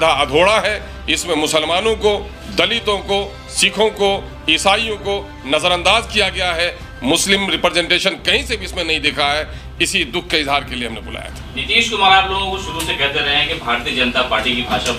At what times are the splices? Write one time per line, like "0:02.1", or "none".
none